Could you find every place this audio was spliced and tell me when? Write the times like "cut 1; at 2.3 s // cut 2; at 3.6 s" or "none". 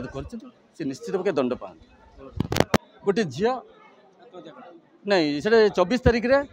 cut 1; at 2.8 s